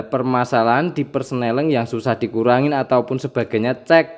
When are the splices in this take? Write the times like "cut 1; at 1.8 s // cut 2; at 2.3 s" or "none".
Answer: none